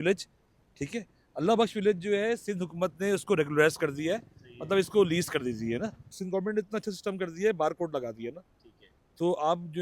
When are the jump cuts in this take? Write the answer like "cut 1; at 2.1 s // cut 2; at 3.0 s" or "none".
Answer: cut 1; at 6.2 s